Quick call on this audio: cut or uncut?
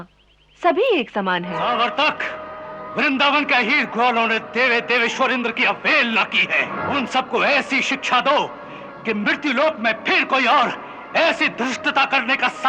cut